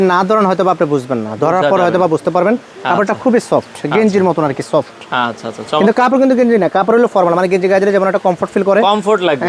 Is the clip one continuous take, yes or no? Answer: yes